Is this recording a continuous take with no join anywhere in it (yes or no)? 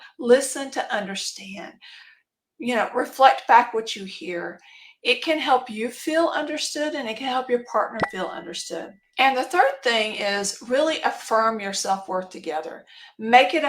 no